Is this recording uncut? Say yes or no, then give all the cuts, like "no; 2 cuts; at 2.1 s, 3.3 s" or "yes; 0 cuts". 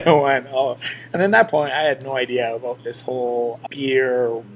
no; 1 cut; at 3.6 s